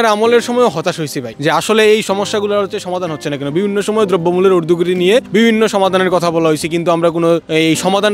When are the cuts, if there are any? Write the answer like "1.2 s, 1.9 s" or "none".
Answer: none